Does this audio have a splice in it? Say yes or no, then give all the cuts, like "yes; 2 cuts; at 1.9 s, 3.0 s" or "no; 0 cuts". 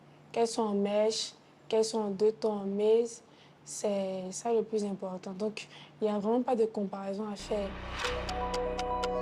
yes; 1 cut; at 7.8 s